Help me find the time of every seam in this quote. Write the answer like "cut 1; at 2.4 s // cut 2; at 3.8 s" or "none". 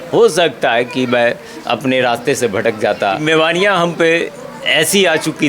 cut 1; at 3.2 s